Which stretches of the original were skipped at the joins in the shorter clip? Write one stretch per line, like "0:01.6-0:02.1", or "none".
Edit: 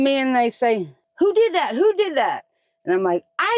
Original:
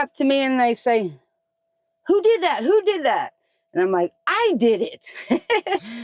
0:01.2-0:01.9